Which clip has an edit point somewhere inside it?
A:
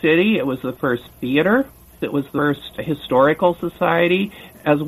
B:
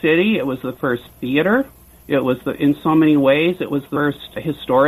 A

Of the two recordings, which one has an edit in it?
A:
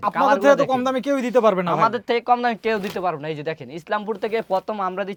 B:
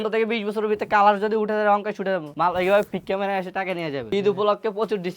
B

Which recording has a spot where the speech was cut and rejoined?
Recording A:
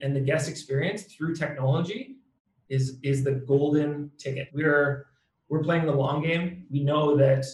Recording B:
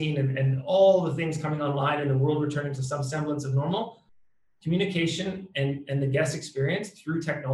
A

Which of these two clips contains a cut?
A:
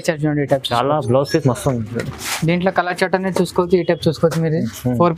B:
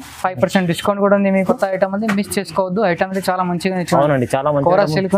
B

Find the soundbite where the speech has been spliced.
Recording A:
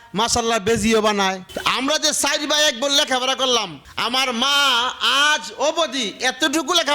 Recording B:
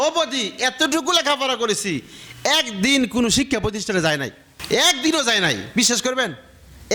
A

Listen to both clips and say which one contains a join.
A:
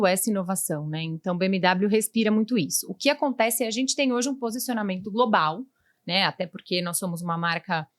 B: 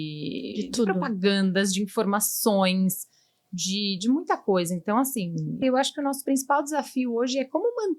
B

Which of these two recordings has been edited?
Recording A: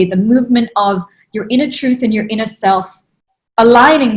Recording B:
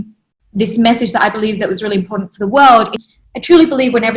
B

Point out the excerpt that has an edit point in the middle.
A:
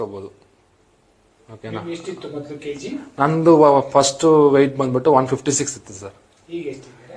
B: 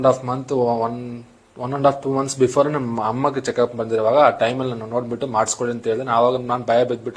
A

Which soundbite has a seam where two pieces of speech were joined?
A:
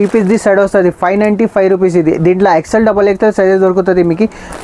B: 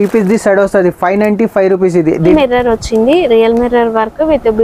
B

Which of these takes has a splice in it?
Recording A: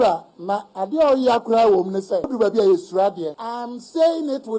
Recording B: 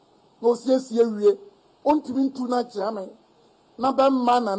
A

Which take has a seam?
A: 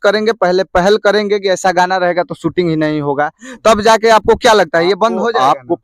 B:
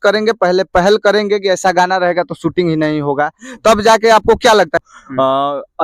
B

